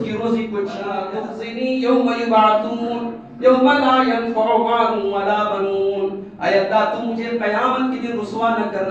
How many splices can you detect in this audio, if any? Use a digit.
1